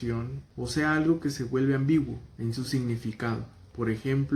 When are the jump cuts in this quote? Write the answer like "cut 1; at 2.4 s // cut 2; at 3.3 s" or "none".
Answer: none

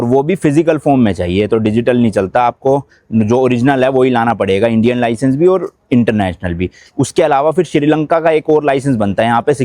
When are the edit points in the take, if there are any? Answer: none

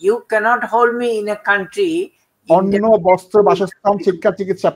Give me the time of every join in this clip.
none

